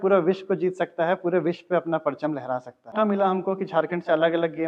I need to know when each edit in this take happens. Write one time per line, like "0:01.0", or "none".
0:02.9